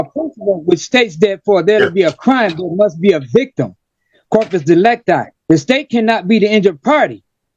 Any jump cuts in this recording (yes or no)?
no